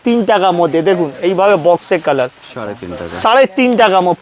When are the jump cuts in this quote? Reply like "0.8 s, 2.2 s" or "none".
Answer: none